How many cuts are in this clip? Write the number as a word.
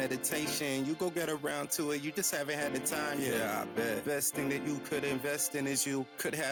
zero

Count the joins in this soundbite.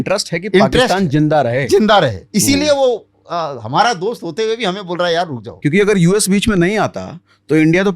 two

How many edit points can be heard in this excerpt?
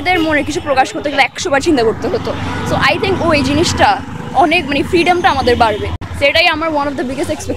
zero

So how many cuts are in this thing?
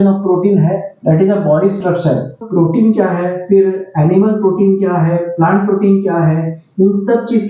one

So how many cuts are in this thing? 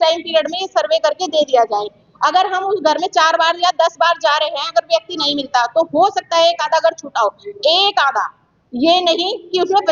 zero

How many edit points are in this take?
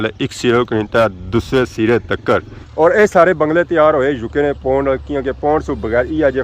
one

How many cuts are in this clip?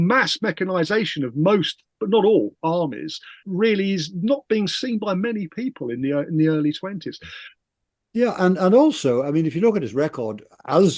two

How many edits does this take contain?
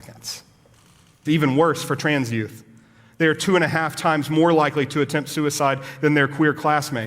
one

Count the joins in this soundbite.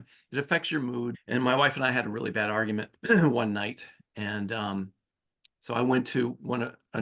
one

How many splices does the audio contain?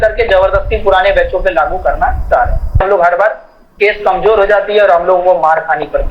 one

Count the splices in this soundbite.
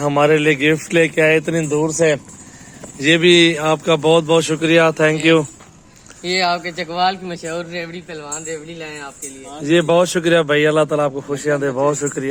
zero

